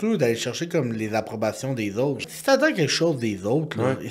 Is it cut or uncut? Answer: cut